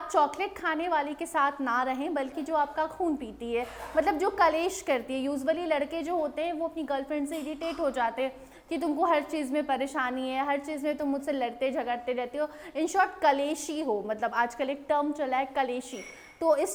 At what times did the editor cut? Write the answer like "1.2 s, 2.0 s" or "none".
none